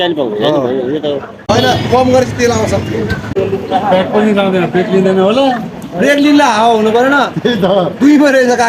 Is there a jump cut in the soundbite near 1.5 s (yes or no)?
yes